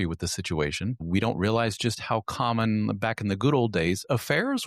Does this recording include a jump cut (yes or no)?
yes